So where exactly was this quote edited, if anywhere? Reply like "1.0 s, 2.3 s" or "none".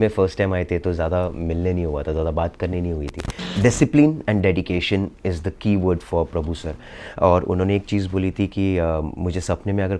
3.4 s